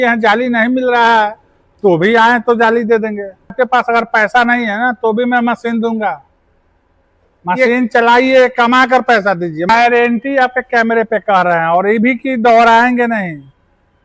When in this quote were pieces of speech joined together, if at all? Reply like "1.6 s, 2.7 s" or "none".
3.5 s, 9.7 s